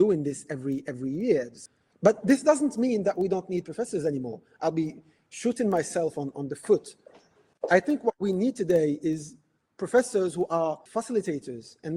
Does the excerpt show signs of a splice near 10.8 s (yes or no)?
yes